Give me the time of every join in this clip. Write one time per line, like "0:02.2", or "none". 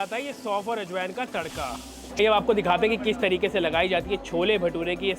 0:02.2